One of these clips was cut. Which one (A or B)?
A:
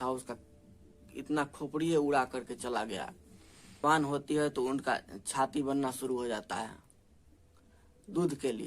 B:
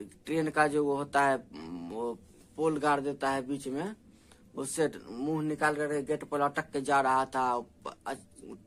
A